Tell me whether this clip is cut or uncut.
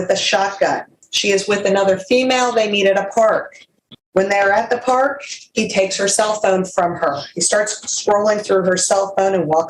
uncut